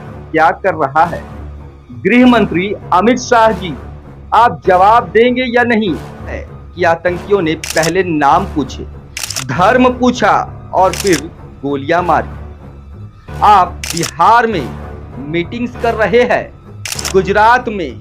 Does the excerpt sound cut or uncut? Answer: cut